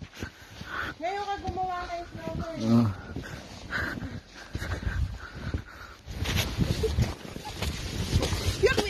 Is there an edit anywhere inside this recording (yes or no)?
yes